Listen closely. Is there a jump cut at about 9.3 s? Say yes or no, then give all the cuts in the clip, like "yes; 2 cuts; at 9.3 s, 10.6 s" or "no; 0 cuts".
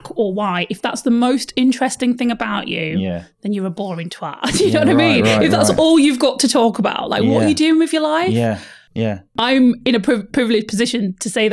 yes; 1 cut; at 9.3 s